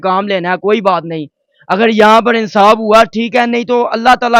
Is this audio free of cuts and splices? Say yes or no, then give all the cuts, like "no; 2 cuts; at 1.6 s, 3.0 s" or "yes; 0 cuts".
yes; 0 cuts